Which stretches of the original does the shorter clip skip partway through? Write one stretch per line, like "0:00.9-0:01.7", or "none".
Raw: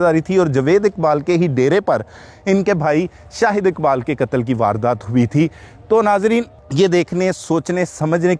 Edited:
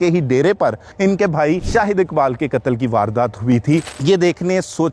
0:02.1-0:02.3
0:03.1-0:03.3
0:05.6-0:06.6